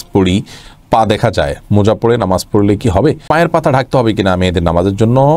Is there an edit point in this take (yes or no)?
yes